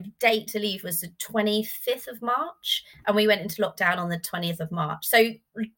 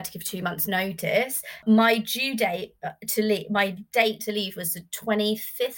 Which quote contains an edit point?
second; 1 cut; at 1.6 s

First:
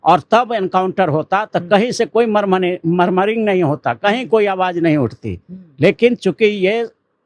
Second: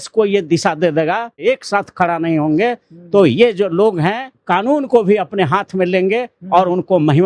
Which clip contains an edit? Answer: second; 2 cuts; at 1.4 s, 4.4 s

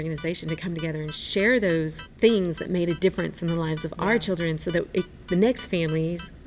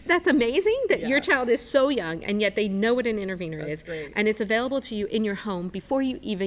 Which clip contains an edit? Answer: first; 1 cut; at 2.0 s

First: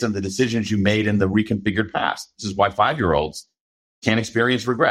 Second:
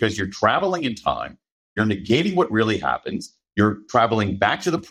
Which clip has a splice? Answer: first; 1 cut; at 2.4 s

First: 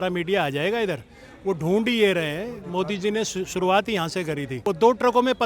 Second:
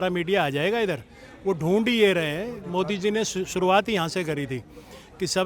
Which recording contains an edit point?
first; 1 cut; at 4.5 s

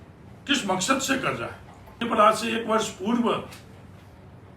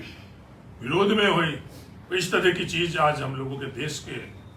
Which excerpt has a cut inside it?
first; 1 cut; at 2.0 s

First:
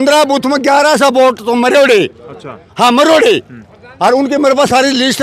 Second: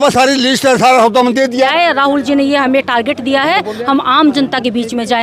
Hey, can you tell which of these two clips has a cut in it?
second; 1 cut; at 1.7 s

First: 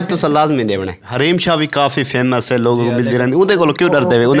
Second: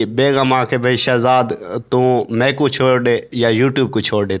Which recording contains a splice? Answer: first; 1 cut; at 1.2 s

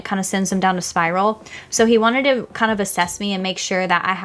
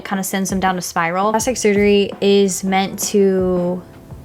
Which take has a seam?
second; 1 cut; at 1.3 s

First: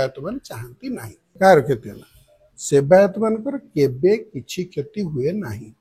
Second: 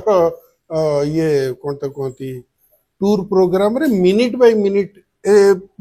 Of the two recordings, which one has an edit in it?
first; 1 cut; at 1.2 s

